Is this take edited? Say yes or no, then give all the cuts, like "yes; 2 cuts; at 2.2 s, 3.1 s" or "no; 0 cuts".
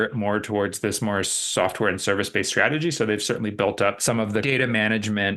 yes; 1 cut; at 4.4 s